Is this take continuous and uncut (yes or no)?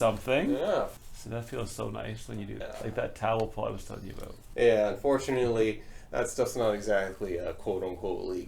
no